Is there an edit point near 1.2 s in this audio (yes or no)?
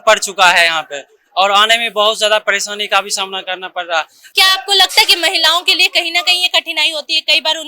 no